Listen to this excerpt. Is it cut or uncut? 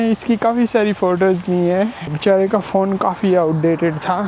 cut